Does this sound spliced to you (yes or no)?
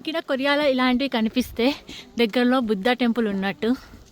no